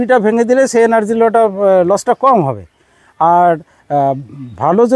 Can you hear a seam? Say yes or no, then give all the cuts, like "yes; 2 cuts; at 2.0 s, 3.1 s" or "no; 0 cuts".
no; 0 cuts